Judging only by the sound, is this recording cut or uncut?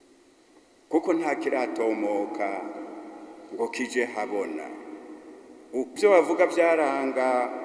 cut